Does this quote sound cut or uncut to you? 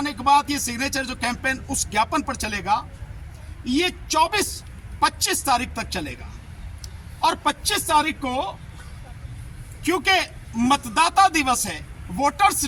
uncut